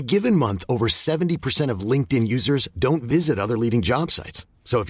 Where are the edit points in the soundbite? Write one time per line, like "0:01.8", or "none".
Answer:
none